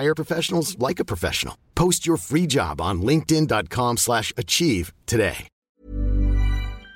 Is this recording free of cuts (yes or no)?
no